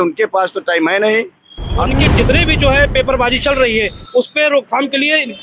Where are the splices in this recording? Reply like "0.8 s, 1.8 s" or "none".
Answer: 1.9 s